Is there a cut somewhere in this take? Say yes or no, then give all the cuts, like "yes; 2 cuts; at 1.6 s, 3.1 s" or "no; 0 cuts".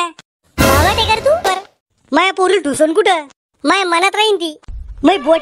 yes; 1 cut; at 1.4 s